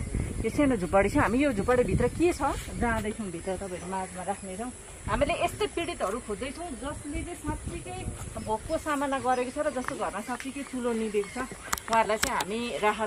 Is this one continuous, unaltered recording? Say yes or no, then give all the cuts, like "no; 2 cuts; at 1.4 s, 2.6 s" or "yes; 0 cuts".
yes; 0 cuts